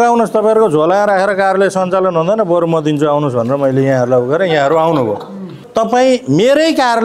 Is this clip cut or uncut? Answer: cut